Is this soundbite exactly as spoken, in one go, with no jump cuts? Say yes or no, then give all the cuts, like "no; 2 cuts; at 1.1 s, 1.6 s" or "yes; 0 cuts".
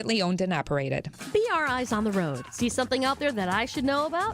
yes; 0 cuts